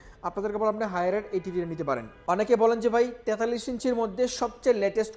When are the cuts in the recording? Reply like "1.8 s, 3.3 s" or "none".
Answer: 2.1 s